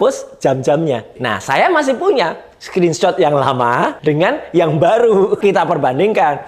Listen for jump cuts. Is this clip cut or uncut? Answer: cut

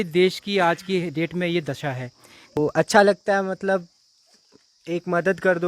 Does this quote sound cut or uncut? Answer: cut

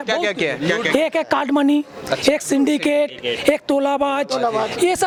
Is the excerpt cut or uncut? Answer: uncut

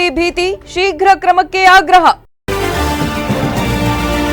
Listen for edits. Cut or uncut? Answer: cut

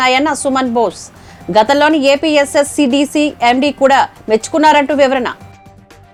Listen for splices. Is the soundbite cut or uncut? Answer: uncut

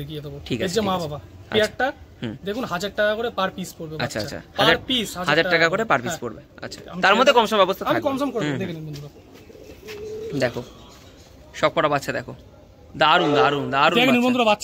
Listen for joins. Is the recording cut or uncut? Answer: uncut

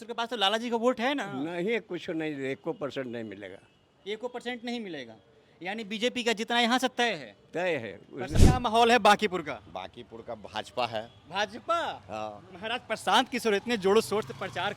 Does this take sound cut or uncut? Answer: cut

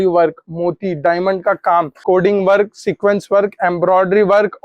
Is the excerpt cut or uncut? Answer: cut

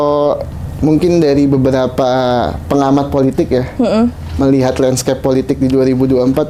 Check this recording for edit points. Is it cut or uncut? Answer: uncut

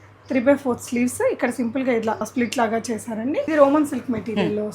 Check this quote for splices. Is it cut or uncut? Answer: cut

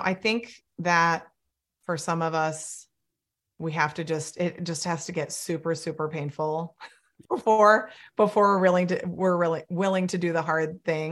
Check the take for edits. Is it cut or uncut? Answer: cut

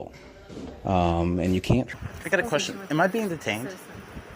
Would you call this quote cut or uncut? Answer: cut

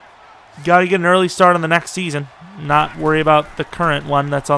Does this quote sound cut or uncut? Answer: uncut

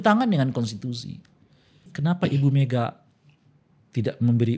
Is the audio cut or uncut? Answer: cut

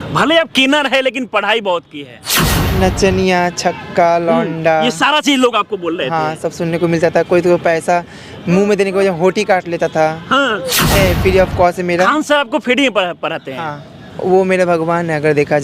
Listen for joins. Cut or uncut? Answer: cut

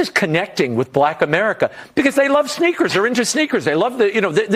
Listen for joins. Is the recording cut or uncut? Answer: uncut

